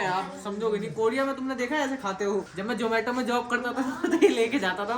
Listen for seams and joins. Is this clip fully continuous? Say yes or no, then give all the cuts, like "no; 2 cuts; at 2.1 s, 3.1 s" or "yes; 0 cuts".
no; 1 cut; at 2.5 s